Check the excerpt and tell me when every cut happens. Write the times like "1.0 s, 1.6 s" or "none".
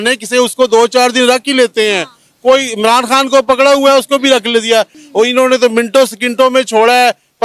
5.0 s